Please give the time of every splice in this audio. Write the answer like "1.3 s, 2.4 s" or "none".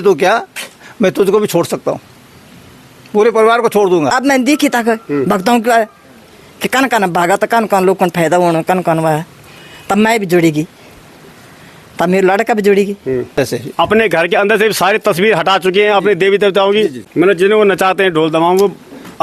4.2 s, 13.4 s, 17.0 s